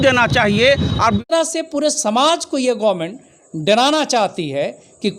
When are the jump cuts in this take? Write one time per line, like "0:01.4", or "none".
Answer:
0:01.2